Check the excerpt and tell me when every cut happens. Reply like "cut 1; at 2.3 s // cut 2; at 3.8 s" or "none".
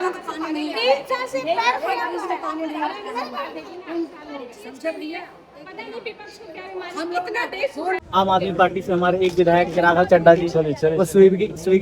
cut 1; at 8.0 s